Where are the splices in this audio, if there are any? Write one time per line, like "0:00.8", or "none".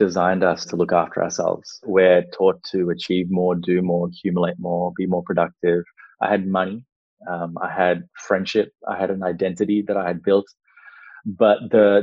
0:01.8
0:06.0